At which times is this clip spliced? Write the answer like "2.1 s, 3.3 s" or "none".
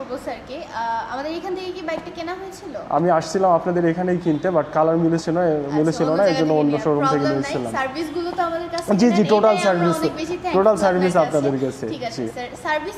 none